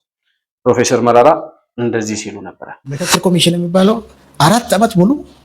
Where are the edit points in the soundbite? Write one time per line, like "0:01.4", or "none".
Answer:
0:03.0